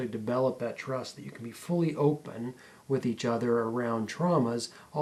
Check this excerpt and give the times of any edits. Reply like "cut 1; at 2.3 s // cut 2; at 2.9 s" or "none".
none